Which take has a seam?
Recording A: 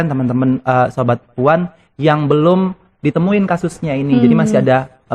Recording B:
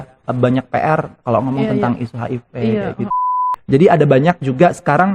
B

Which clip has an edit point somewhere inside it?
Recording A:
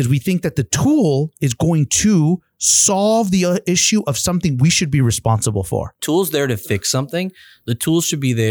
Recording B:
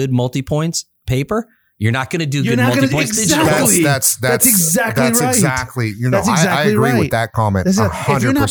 A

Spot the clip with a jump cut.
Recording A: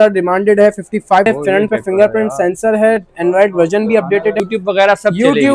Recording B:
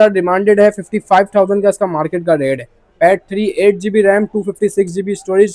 A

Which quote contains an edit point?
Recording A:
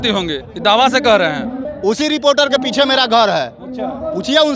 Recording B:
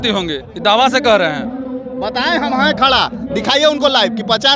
A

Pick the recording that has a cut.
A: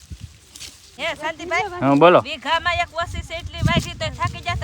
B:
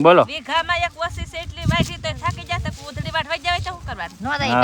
A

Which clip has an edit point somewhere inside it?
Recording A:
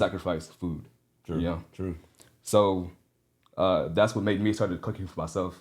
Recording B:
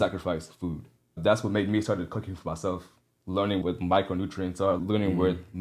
B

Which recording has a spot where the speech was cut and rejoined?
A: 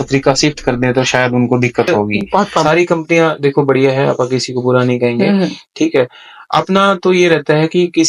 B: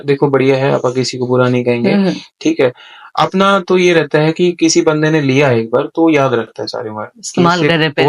A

